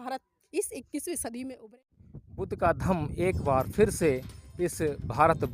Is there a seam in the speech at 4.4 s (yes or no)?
no